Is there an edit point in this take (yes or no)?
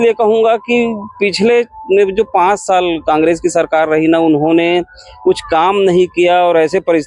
no